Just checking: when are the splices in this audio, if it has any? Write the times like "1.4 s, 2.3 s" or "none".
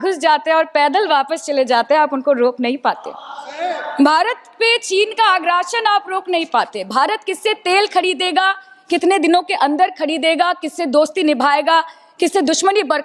none